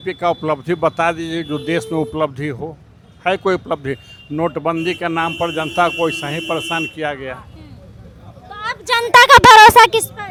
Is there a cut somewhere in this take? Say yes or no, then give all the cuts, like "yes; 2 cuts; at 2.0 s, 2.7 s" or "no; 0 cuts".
no; 0 cuts